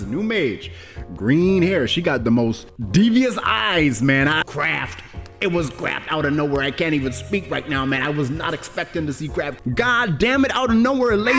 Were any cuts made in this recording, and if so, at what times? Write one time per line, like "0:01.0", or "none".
0:04.4
0:09.6